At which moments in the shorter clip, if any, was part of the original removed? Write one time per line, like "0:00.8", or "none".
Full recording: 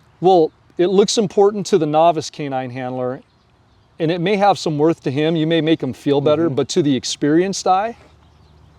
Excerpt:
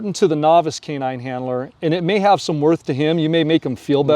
0:01.7